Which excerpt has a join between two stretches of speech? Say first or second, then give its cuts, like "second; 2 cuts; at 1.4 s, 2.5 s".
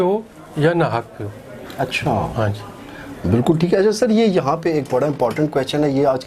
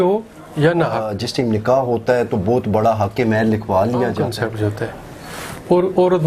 second; 2 cuts; at 1.2 s, 4.2 s